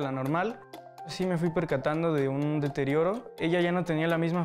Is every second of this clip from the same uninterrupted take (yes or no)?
no